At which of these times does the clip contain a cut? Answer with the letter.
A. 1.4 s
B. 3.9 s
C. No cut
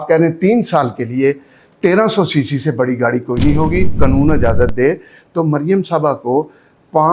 B